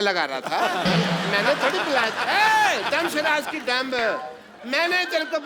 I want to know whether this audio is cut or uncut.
uncut